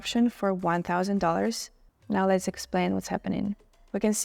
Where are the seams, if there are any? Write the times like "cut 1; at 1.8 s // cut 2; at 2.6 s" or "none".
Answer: none